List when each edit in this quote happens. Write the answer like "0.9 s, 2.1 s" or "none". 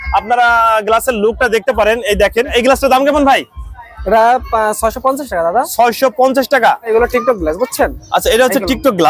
2.5 s, 6.9 s